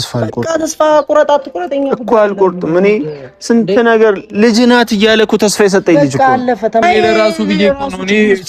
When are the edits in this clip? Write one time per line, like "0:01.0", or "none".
0:06.8